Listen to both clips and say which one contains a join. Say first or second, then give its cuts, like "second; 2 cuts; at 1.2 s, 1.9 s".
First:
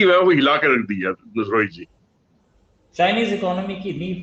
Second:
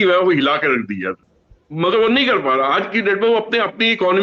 second; 1 cut; at 1.2 s